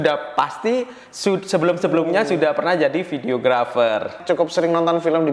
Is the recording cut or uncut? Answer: cut